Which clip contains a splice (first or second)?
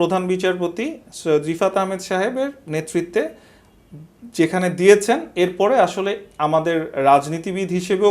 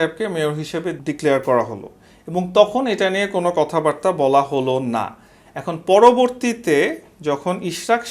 second